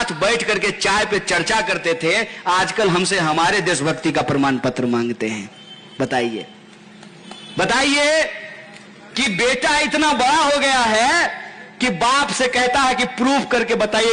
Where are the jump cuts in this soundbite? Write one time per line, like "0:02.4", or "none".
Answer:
none